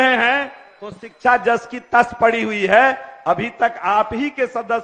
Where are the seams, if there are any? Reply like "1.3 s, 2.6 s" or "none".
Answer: none